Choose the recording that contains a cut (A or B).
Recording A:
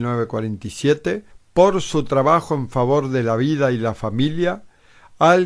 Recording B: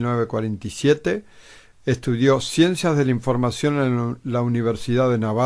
B